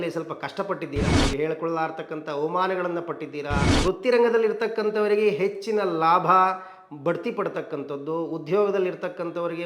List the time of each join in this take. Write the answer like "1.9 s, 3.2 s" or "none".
1.2 s, 3.6 s